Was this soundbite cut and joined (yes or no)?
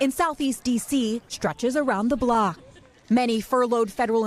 yes